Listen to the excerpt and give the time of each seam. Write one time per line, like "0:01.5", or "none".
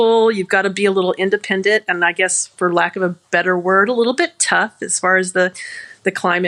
none